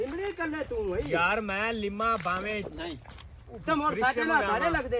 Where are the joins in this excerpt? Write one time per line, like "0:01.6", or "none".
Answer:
none